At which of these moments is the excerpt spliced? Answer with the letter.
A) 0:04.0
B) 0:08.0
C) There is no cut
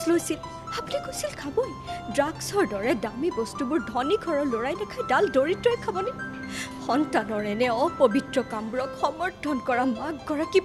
C